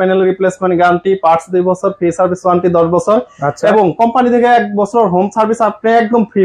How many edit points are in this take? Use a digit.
0